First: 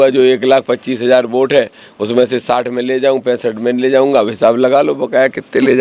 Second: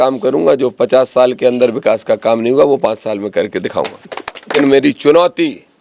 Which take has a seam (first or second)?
second